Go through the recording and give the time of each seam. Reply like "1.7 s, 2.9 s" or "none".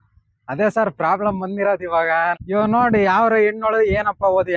2.4 s